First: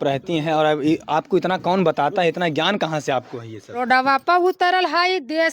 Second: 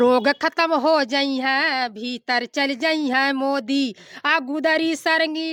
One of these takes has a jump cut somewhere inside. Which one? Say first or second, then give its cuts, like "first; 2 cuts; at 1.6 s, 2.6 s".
first; 1 cut; at 3.6 s